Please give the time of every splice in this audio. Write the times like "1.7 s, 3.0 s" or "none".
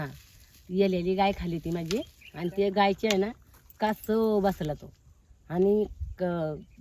2.2 s